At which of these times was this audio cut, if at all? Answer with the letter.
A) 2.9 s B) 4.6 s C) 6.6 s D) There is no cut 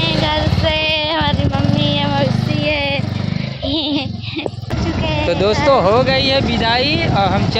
B